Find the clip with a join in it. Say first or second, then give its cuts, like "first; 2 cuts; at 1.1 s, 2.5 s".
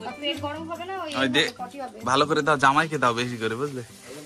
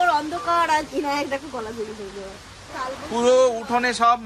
second; 1 cut; at 2.7 s